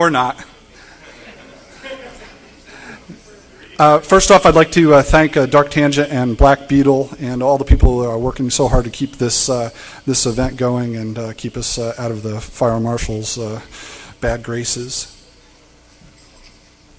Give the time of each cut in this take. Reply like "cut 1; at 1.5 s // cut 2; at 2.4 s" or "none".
cut 1; at 4.2 s